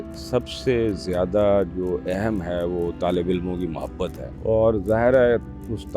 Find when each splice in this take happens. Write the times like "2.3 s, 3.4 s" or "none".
4.3 s